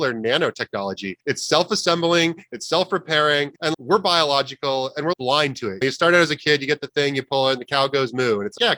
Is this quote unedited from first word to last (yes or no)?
no